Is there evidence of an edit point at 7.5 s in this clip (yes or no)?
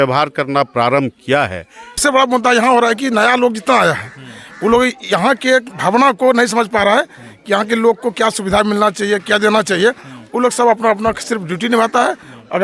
no